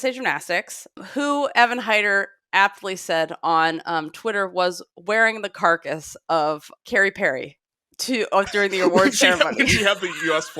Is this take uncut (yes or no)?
no